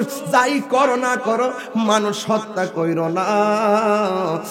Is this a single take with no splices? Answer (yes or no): yes